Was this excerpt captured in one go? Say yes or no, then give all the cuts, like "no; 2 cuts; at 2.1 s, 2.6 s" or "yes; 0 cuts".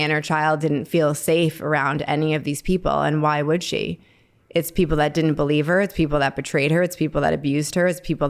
yes; 0 cuts